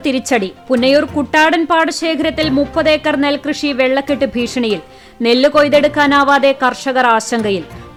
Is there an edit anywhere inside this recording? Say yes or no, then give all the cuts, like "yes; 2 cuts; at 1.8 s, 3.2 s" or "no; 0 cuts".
no; 0 cuts